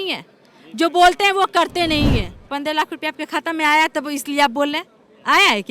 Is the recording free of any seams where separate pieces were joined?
no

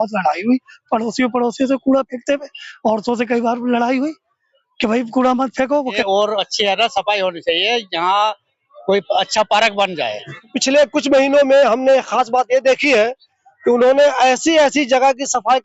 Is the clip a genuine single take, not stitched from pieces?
no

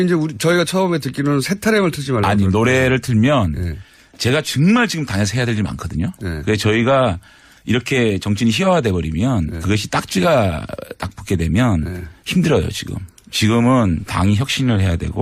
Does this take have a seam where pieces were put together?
yes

